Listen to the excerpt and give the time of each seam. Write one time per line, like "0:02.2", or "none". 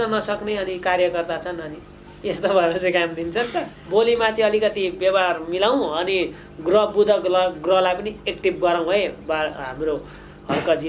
0:03.8